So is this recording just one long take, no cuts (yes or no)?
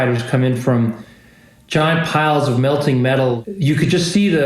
no